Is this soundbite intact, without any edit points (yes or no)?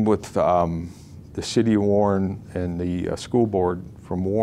yes